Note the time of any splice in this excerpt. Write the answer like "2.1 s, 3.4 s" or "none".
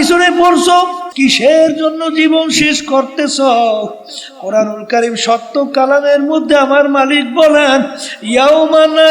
1.0 s

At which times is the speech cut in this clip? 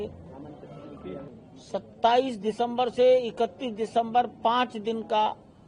1.3 s

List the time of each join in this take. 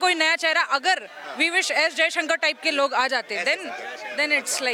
none

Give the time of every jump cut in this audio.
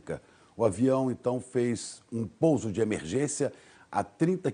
none

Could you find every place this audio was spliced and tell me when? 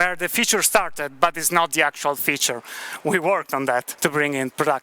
3.9 s

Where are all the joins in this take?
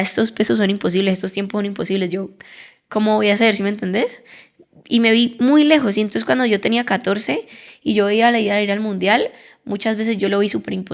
none

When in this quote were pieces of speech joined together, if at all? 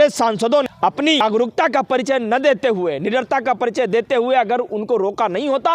1.2 s

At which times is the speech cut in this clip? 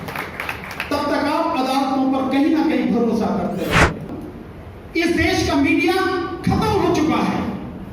4.1 s

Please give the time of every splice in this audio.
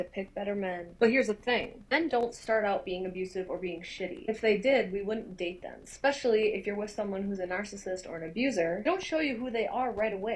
4.9 s

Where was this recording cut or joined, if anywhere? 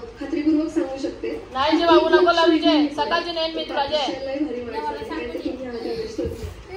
none

